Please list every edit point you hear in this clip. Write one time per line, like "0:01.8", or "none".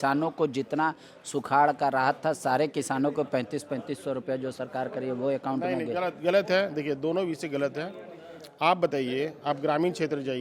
none

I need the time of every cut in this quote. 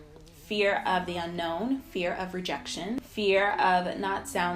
0:03.0

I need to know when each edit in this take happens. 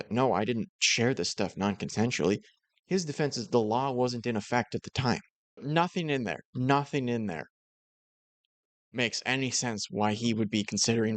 0:05.6

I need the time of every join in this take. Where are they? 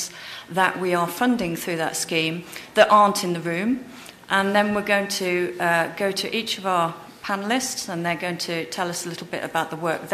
0:07.5

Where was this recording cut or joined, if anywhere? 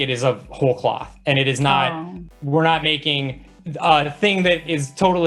none

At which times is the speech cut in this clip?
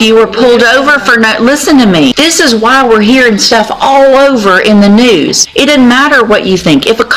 0:02.1
0:05.4

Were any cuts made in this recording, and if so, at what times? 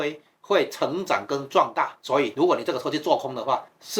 0:02.0

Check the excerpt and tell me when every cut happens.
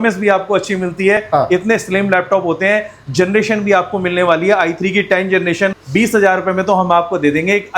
0:01.2
0:05.8

